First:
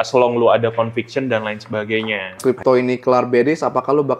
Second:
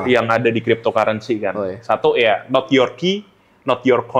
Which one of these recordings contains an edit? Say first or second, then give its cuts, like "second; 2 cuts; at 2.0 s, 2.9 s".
first; 1 cut; at 2.4 s